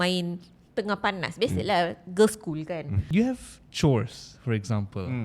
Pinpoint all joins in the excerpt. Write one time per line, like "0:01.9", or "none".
0:03.0